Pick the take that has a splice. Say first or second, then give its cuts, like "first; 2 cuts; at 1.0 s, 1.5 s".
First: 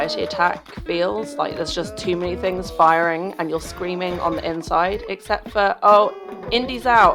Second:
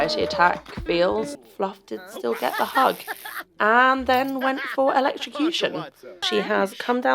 second; 2 cuts; at 1.3 s, 6.2 s